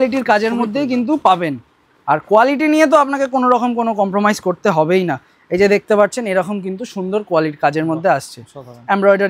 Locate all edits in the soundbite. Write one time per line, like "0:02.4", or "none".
none